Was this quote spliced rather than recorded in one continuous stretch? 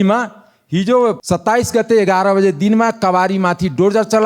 yes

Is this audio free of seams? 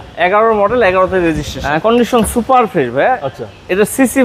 no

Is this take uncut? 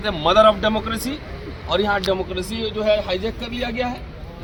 yes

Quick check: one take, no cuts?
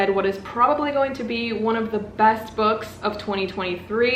yes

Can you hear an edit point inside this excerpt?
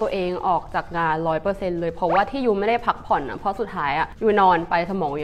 no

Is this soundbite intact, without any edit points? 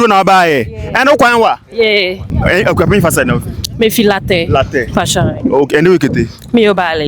no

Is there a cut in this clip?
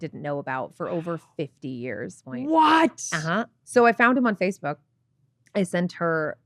yes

